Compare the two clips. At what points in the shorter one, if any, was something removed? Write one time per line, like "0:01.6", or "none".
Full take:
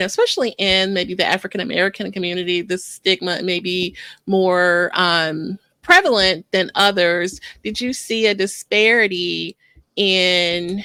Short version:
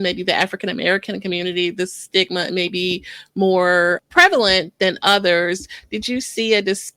0:04.0